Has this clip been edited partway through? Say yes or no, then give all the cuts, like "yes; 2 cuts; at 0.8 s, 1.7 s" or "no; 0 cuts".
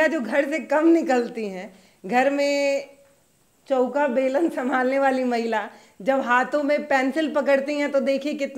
no; 0 cuts